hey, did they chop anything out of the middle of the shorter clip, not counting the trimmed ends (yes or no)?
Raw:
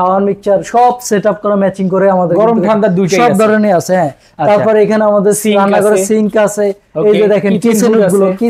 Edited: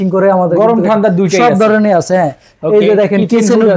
yes